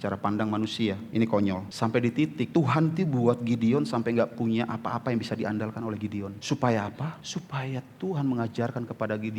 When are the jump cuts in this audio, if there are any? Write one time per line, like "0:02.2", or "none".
0:01.0
0:01.7
0:02.5
0:06.4
0:07.2